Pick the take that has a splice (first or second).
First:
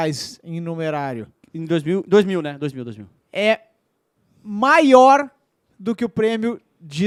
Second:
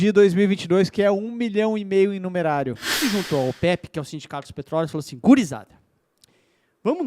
second